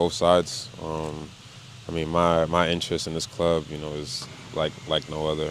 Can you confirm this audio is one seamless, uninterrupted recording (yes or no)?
yes